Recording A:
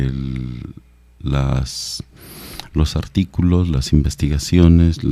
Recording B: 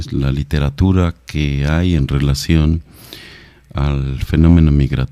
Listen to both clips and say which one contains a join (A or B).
B